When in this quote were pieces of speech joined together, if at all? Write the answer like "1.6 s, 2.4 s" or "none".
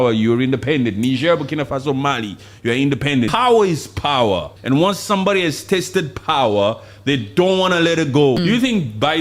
3.3 s, 4.5 s, 8.4 s